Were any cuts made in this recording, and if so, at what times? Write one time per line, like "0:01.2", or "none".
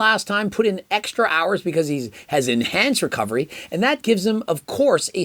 none